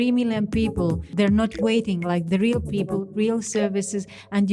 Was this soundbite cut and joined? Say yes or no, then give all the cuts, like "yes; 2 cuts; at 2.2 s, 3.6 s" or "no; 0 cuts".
yes; 1 cut; at 1.0 s